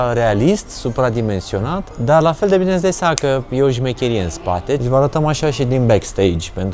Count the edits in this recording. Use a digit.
2